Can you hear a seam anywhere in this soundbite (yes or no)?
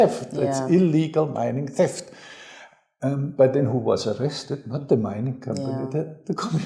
no